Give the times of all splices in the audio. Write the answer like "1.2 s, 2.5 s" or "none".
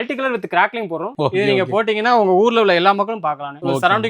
1.1 s